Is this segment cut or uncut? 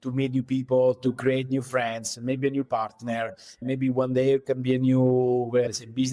uncut